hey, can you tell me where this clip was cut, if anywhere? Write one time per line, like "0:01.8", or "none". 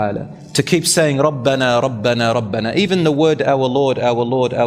none